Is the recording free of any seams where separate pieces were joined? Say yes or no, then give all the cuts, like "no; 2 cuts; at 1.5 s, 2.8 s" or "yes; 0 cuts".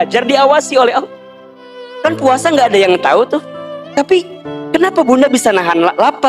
no; 1 cut; at 3.5 s